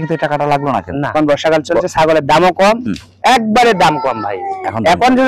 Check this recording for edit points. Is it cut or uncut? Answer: cut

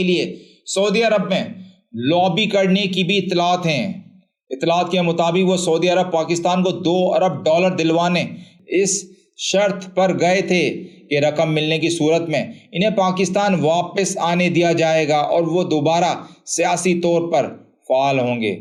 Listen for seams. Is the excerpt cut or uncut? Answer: uncut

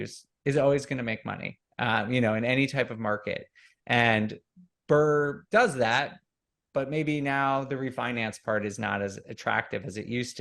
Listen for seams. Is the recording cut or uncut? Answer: cut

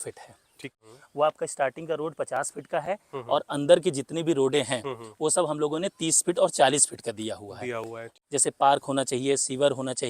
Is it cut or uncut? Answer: cut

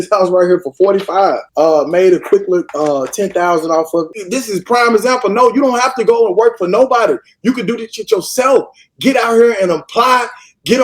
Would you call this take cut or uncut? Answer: cut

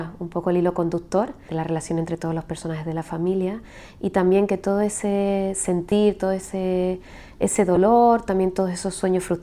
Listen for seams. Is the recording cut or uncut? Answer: cut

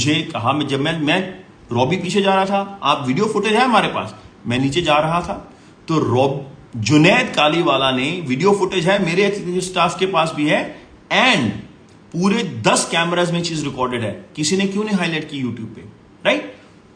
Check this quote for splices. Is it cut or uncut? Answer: uncut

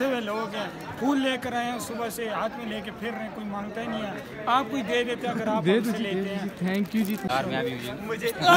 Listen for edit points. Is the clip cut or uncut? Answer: cut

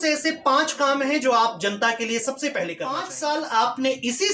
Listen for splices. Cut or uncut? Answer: cut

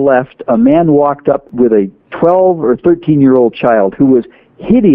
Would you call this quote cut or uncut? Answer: cut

